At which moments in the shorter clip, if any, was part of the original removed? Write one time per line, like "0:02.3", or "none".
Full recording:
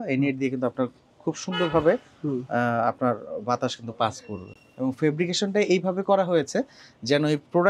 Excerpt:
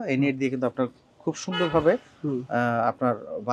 none

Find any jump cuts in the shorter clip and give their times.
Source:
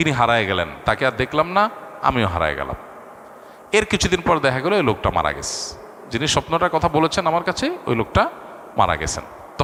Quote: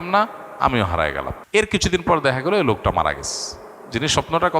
0:01.4

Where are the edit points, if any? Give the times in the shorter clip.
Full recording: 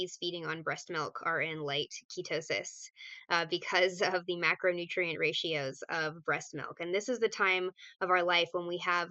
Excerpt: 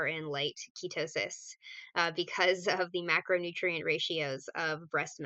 none

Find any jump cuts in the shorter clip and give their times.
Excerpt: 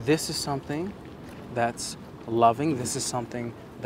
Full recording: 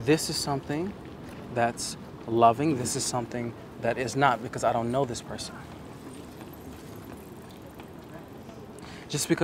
none

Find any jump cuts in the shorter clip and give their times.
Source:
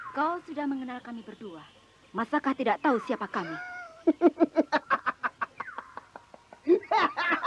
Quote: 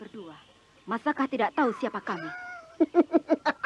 none

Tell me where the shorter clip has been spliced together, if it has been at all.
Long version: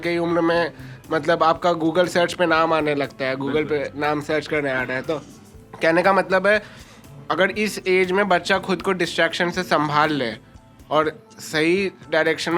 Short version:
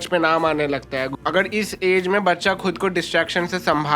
0:01.1

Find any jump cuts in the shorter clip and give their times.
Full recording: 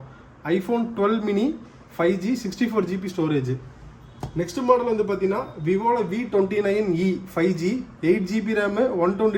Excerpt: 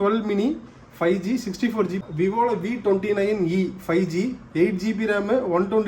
0:02.1

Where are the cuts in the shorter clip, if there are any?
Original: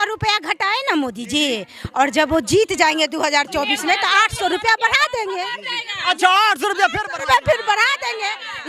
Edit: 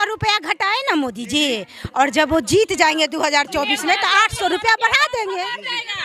none

